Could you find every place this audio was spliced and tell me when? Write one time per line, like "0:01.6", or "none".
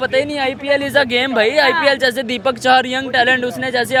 none